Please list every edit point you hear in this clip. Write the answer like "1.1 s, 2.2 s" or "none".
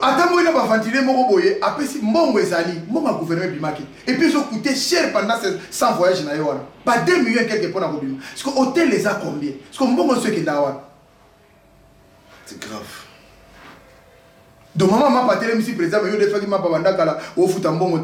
none